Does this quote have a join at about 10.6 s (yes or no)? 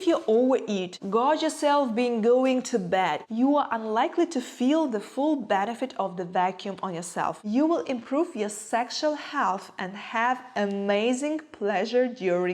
no